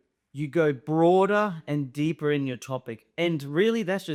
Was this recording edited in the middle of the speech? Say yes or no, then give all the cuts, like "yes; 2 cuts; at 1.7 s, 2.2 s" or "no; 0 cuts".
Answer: no; 0 cuts